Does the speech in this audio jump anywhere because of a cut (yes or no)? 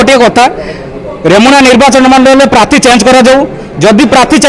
no